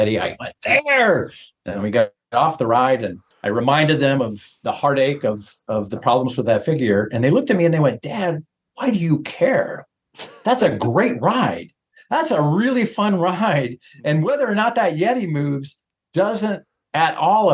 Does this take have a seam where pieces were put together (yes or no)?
no